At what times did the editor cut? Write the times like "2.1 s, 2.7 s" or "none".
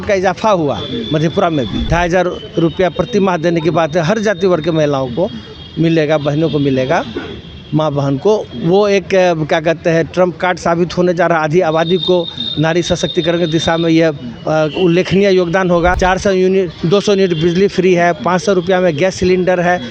1.9 s, 16.0 s